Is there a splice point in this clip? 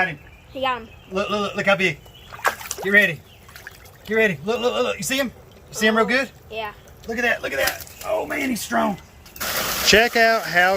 yes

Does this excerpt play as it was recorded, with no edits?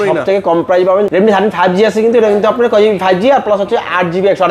no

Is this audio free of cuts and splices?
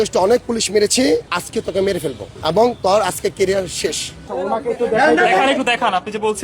no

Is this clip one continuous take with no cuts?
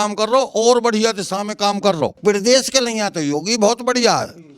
no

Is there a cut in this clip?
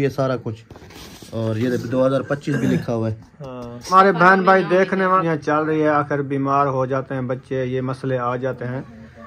yes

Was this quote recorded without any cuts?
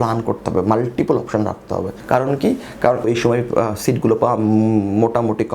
no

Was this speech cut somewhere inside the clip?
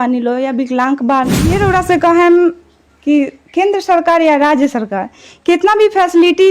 yes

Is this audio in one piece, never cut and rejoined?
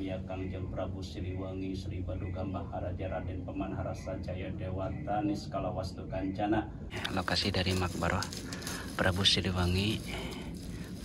no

